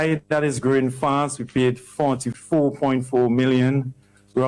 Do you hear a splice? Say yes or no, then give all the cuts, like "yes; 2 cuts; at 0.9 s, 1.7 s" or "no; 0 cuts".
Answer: yes; 1 cut; at 2.3 s